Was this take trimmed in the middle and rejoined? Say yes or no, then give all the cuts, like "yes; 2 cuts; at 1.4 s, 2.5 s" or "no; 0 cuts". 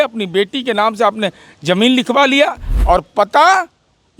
yes; 1 cut; at 2.7 s